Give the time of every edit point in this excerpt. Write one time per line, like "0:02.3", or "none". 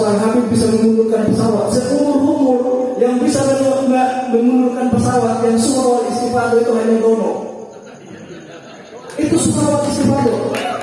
none